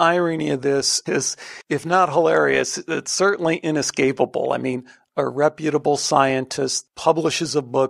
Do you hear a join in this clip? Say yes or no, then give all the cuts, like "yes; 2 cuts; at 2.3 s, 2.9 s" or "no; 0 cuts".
yes; 2 cuts; at 1.0 s, 6.8 s